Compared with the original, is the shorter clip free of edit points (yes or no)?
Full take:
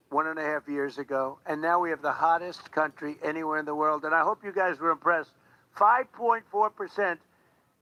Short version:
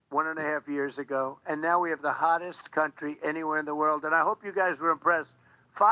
yes